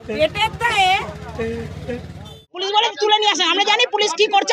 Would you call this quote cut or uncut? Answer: cut